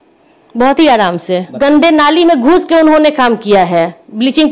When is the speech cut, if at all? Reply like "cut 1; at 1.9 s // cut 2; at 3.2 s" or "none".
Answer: cut 1; at 1.5 s